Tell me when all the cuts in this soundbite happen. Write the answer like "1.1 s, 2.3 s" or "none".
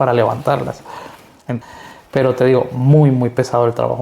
1.5 s